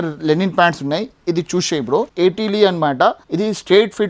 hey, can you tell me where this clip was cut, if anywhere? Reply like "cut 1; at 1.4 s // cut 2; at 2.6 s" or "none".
cut 1; at 2.1 s // cut 2; at 3.2 s